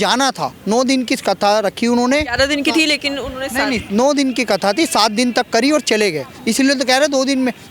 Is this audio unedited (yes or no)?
yes